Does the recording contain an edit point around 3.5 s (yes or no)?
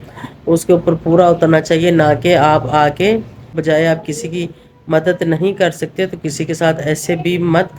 yes